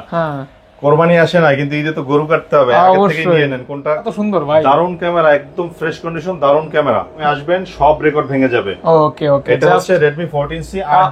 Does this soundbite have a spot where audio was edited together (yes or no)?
yes